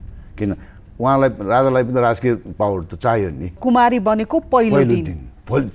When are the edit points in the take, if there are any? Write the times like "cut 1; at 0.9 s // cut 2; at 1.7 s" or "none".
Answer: none